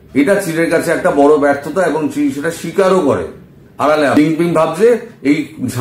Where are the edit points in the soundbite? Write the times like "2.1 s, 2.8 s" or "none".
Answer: 4.2 s